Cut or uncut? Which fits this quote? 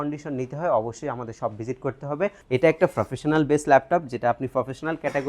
cut